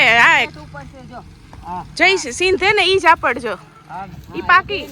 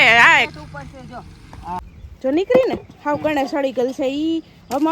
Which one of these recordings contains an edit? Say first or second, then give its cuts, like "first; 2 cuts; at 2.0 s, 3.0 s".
second; 1 cut; at 1.9 s